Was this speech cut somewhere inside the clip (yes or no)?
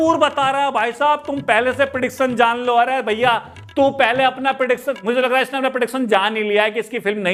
no